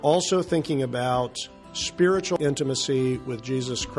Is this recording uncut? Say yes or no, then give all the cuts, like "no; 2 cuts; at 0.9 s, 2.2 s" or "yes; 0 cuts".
no; 1 cut; at 2.4 s